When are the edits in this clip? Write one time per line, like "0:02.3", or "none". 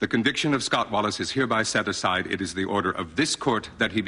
none